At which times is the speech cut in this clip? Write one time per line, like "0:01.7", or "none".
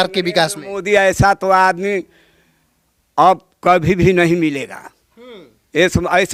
none